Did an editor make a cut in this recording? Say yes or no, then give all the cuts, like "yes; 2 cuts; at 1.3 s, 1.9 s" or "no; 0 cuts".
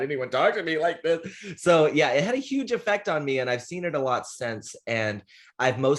no; 0 cuts